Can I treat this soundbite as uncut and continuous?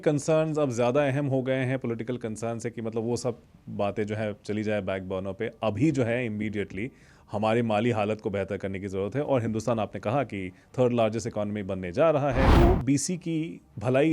no; 1 cut; at 12.5 s

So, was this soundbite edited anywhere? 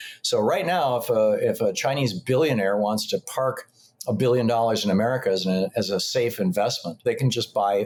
no; 0 cuts

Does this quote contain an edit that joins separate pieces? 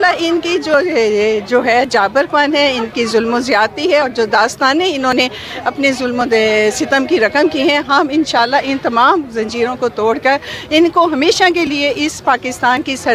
no; 0 cuts

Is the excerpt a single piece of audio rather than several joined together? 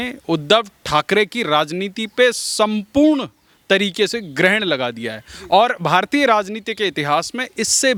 yes; 0 cuts

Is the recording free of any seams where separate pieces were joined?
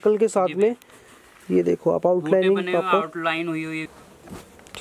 no; 1 cut; at 3.9 s

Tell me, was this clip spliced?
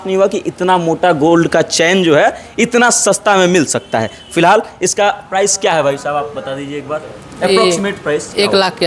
no; 0 cuts

